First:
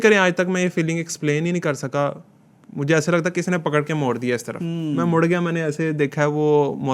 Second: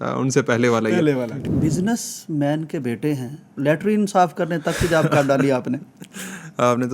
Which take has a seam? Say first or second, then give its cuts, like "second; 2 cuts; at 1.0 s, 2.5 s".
second; 2 cuts; at 1.4 s, 3.5 s